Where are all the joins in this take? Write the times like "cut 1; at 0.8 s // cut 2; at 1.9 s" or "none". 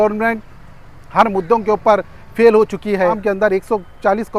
cut 1; at 3.2 s